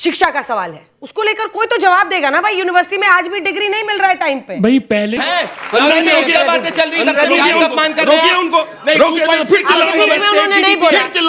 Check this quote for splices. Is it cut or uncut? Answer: cut